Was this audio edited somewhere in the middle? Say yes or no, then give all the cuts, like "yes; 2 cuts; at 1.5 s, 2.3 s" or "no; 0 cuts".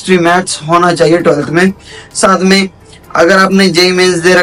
no; 0 cuts